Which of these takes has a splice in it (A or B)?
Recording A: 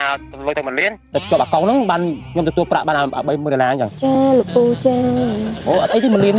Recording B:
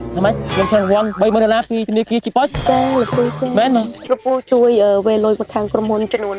B